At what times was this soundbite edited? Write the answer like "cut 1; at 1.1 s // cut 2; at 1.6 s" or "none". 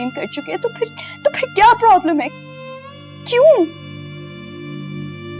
cut 1; at 3.8 s